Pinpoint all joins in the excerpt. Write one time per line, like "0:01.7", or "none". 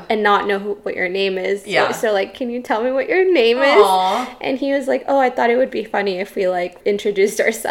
0:06.8